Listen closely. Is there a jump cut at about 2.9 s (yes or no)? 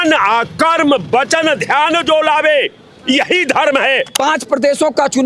no